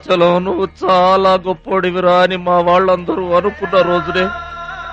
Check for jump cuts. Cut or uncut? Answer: uncut